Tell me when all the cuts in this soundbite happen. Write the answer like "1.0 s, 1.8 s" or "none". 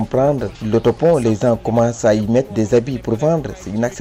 none